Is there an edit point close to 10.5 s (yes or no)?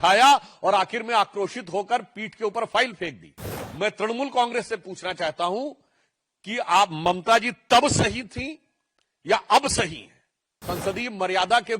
yes